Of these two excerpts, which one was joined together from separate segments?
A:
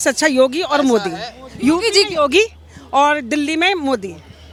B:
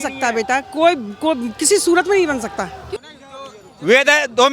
B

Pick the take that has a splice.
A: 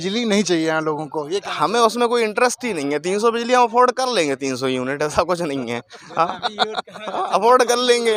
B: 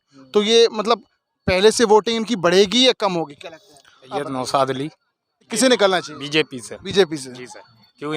B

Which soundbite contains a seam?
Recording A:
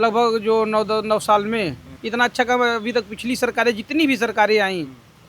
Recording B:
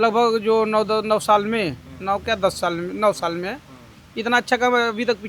A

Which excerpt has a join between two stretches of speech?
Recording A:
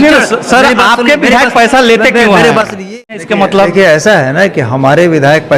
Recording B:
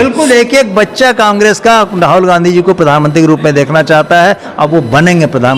A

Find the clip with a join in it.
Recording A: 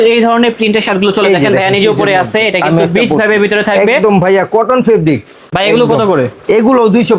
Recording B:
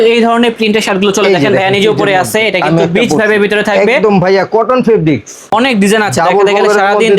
B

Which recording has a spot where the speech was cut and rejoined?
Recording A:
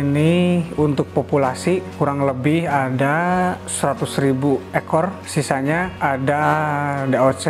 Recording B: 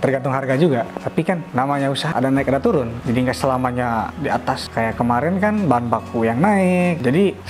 B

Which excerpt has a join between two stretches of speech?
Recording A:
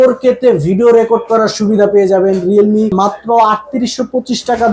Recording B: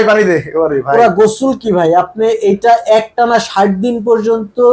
A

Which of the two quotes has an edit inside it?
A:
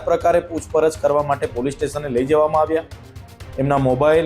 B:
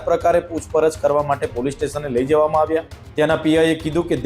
B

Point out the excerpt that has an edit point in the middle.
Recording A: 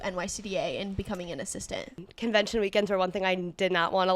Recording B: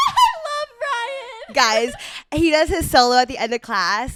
A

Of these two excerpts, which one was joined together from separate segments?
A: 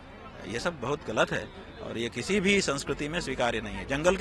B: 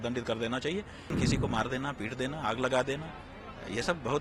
B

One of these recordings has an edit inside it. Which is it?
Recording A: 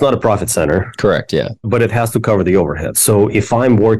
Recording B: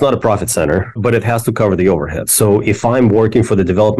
B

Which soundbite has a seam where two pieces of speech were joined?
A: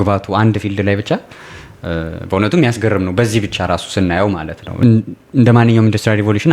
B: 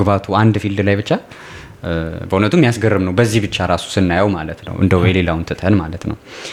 A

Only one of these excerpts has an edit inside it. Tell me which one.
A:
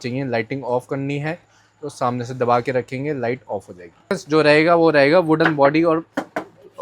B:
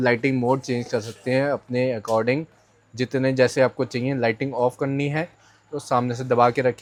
A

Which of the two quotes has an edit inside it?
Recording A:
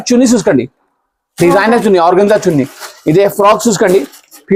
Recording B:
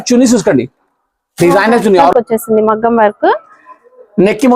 B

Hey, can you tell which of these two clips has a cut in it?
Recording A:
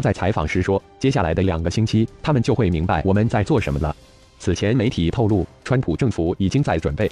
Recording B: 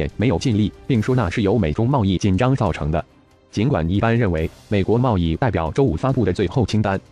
A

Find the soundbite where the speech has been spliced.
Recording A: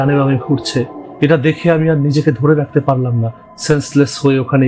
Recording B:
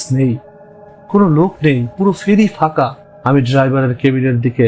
B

